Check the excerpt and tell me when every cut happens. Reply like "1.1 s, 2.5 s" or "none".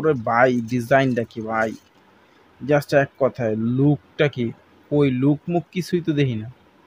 none